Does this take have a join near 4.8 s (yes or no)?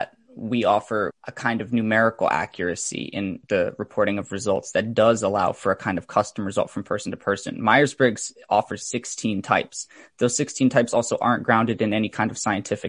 no